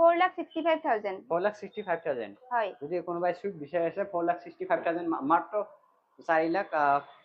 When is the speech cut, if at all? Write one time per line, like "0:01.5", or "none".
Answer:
none